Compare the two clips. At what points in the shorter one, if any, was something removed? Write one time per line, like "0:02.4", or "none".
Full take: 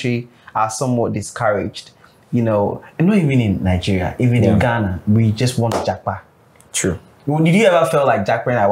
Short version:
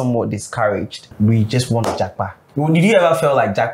0:01.1
0:02.4